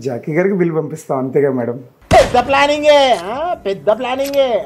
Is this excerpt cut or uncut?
uncut